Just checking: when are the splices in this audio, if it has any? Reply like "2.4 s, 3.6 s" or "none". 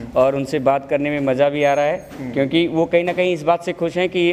none